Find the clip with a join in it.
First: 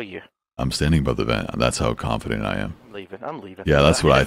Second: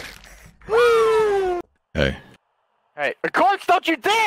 second; 1 cut; at 1.6 s

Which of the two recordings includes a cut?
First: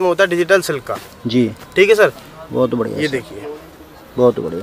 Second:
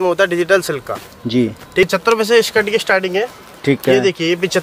second; 1 cut; at 1.9 s

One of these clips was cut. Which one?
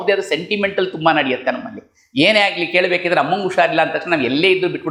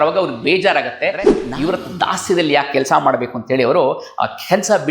second; 1 cut; at 1.4 s

